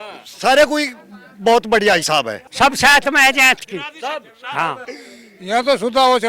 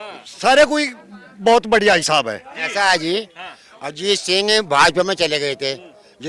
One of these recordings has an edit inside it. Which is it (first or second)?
first